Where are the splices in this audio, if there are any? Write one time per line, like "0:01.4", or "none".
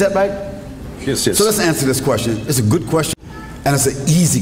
0:03.1